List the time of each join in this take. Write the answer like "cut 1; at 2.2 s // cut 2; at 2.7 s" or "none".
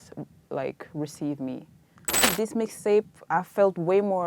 cut 1; at 2.3 s